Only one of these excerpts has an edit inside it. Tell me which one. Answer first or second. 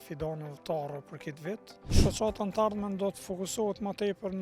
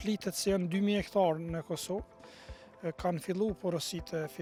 first